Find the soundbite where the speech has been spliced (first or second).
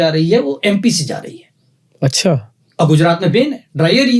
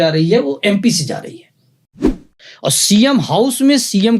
second